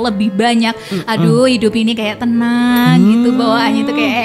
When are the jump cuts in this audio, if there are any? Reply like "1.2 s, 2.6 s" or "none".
none